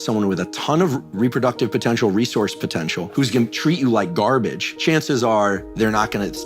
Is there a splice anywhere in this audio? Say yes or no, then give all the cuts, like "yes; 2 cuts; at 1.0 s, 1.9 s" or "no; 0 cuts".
yes; 2 cuts; at 3.1 s, 4.6 s